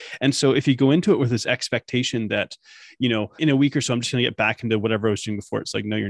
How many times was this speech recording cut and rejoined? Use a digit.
1